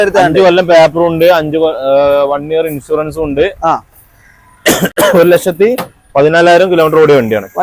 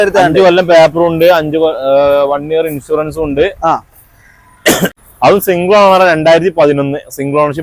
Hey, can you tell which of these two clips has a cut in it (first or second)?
second